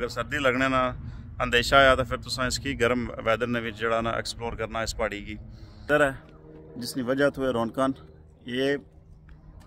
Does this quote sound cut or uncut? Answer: cut